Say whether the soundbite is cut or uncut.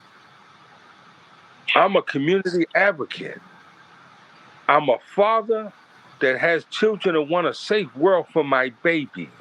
uncut